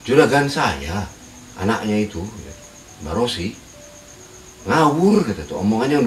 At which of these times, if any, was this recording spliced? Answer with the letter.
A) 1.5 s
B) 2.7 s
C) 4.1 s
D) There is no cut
D